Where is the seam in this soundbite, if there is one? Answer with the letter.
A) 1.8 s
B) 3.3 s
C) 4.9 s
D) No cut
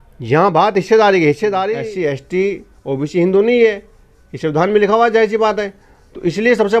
A